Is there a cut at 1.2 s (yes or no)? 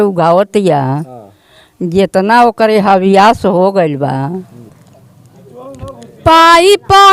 no